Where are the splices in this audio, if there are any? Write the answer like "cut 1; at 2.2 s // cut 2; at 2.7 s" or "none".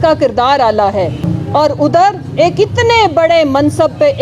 cut 1; at 1.3 s